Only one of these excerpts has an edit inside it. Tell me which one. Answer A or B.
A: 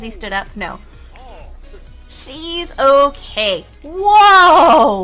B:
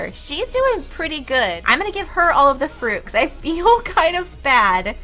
A